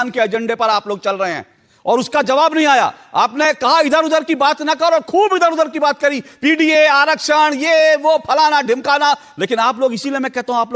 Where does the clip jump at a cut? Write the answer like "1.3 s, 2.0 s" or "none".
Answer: none